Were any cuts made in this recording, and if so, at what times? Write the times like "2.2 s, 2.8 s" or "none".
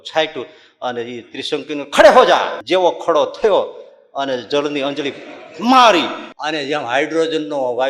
2.6 s, 6.3 s